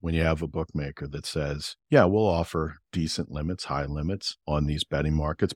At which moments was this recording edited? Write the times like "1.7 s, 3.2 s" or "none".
1.7 s, 2.8 s, 4.3 s